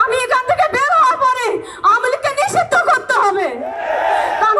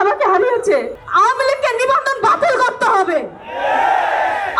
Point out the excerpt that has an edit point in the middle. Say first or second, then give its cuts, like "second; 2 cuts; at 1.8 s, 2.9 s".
second; 1 cut; at 1.0 s